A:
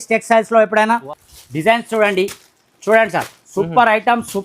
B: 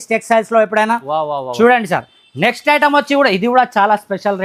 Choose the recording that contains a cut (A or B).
A